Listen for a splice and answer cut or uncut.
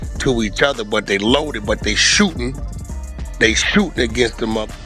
uncut